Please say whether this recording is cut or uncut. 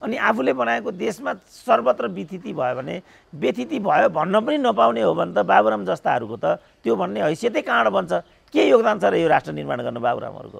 uncut